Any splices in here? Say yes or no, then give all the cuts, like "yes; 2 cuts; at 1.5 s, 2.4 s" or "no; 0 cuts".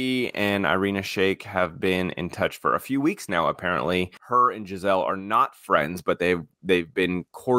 yes; 1 cut; at 4.2 s